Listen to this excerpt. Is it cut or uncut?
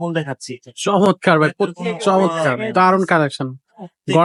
uncut